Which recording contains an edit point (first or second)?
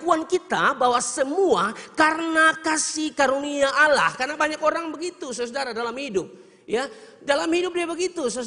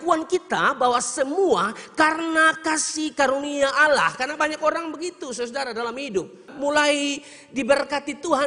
second